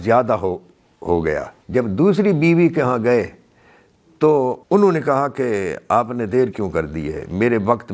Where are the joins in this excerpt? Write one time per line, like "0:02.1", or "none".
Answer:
0:01.6
0:04.6